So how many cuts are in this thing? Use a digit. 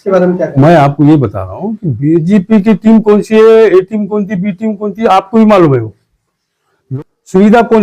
1